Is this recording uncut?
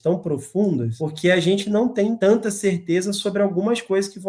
no; 2 cuts; at 1.0 s, 2.2 s

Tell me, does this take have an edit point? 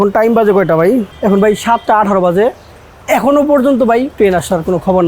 yes; 2 cuts; at 1.1 s, 4.1 s

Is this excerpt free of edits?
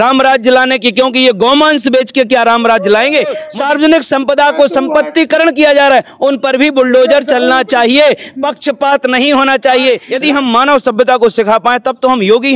no; 2 cuts; at 3.5 s, 10.1 s

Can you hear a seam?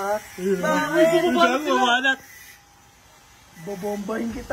no; 0 cuts

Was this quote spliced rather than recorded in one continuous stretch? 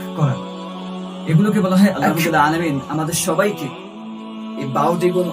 yes; 1 cut; at 2.1 s

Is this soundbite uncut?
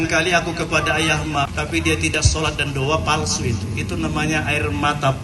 no; 1 cut; at 1.5 s

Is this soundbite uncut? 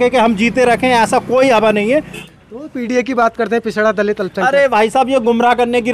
no; 1 cut; at 2.2 s

